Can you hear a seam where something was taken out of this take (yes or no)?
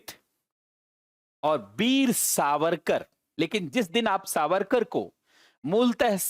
yes